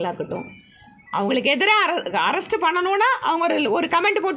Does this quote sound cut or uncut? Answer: uncut